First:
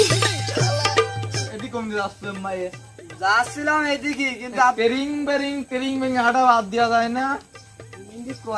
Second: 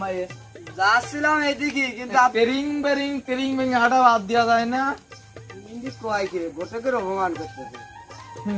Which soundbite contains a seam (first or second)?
first